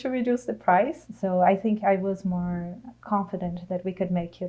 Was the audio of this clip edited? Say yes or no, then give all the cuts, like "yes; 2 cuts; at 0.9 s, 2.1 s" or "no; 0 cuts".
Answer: yes; 1 cut; at 1.0 s